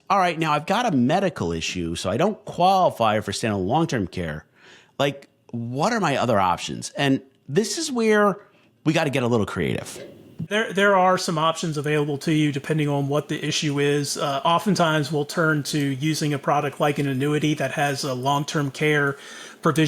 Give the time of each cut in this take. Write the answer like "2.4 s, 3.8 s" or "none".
none